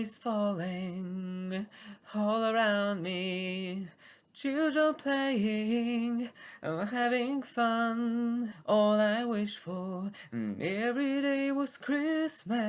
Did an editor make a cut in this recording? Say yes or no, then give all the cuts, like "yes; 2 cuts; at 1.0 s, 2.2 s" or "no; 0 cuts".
yes; 1 cut; at 8.5 s